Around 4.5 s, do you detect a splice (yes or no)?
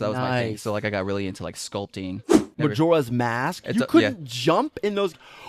no